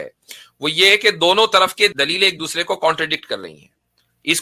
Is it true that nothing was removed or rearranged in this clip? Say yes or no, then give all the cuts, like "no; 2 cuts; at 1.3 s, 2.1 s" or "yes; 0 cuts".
no; 1 cut; at 1.9 s